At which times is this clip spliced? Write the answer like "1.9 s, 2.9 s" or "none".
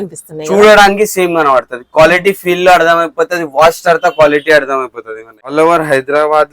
5.5 s